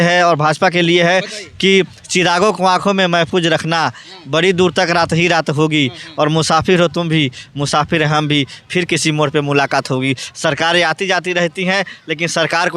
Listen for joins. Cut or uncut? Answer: uncut